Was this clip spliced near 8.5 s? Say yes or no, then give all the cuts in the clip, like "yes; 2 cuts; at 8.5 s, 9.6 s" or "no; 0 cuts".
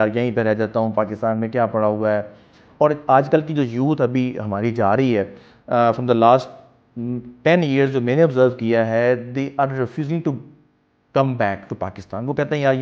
no; 0 cuts